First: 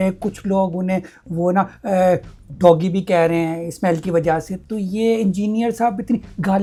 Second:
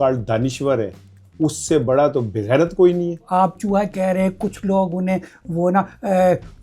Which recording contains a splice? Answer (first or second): second